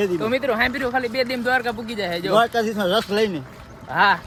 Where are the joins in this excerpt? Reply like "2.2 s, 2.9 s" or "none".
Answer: none